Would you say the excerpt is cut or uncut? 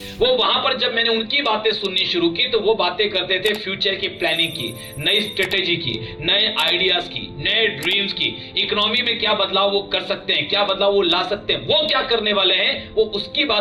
uncut